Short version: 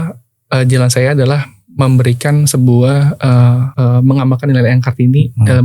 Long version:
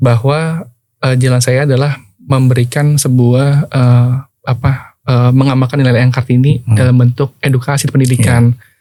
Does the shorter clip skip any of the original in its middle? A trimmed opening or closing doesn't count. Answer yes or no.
yes